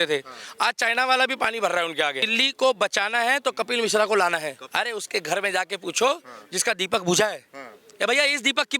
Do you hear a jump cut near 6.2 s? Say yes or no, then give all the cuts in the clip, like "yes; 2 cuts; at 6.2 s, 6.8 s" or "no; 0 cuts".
no; 2 cuts; at 2.3 s, 4.6 s